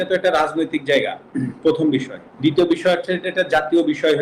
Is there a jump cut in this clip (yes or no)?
yes